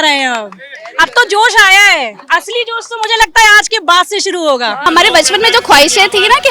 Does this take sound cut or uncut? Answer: cut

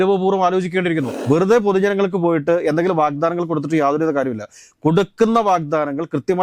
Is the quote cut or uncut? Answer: cut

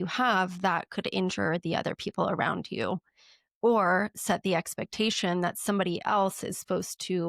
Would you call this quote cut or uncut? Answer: uncut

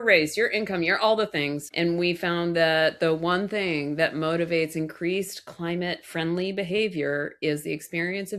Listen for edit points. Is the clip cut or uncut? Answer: cut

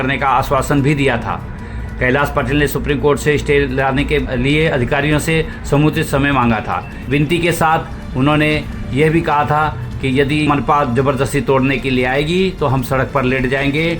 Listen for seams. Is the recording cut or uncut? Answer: cut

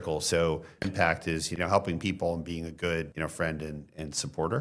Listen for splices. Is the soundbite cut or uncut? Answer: cut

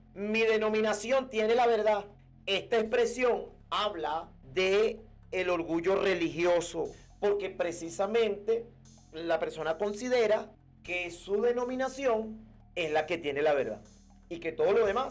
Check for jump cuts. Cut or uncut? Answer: uncut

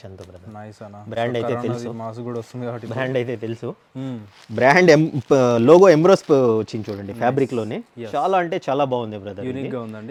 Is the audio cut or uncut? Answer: uncut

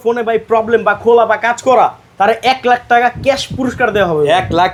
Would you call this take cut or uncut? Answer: uncut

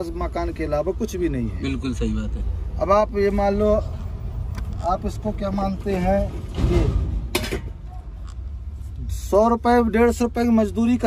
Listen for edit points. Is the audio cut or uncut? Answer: uncut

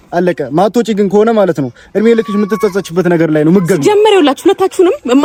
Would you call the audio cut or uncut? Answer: uncut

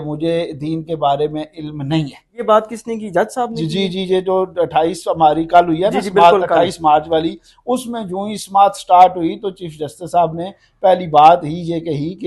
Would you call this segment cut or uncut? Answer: cut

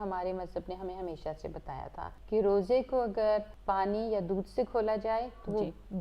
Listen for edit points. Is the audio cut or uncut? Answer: cut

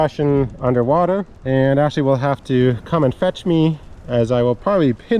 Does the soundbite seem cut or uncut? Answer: uncut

